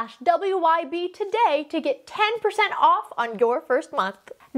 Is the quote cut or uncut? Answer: uncut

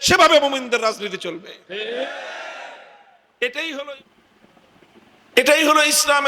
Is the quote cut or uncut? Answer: cut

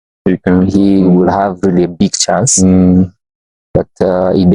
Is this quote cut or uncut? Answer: uncut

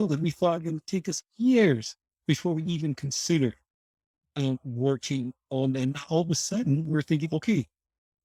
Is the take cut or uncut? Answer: uncut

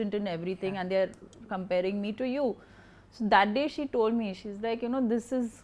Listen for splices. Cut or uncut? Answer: uncut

